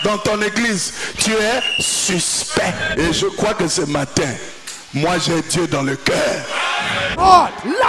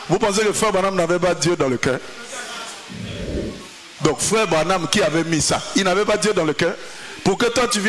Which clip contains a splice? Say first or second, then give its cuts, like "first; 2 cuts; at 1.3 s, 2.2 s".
first; 2 cuts; at 2.9 s, 7.1 s